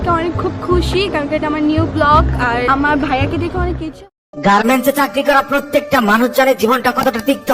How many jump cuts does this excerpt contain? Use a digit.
1